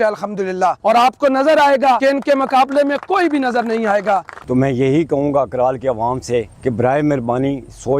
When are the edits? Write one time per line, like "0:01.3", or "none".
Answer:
0:00.8
0:02.0
0:04.3
0:06.5